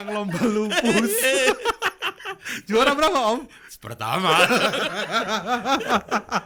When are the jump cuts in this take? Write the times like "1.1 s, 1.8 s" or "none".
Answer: none